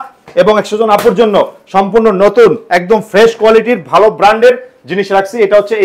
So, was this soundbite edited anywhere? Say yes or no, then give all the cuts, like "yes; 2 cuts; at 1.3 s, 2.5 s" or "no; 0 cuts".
no; 0 cuts